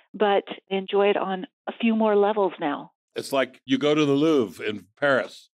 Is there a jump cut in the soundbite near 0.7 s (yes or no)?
yes